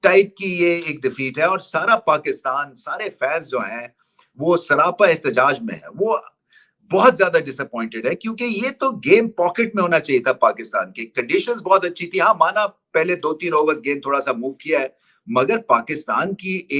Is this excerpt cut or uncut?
uncut